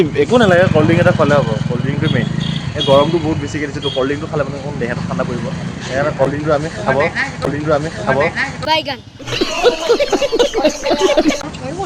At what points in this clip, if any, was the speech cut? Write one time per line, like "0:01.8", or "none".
none